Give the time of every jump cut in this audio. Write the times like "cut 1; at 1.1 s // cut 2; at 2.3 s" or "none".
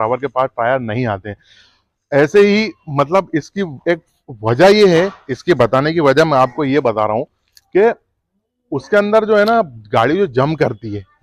none